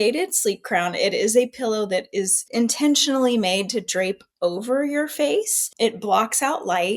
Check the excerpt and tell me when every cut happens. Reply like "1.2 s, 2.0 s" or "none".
2.5 s, 5.6 s